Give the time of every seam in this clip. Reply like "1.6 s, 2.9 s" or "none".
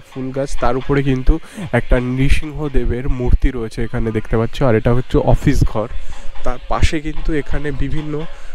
none